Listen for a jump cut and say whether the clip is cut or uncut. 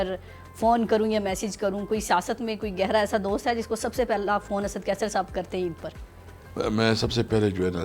uncut